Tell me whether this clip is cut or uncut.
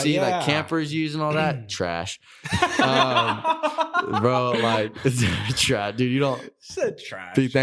uncut